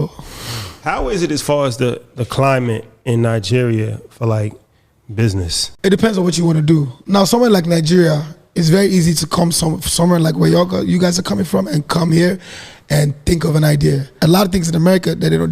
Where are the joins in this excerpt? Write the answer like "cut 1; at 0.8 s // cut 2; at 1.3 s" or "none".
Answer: cut 1; at 5.6 s // cut 2; at 6.9 s // cut 3; at 14.2 s